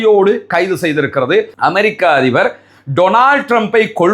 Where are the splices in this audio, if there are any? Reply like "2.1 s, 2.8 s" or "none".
1.5 s